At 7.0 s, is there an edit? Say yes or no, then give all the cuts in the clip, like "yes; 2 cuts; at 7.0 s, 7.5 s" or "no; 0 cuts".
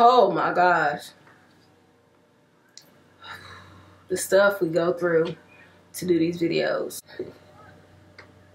yes; 1 cut; at 7.0 s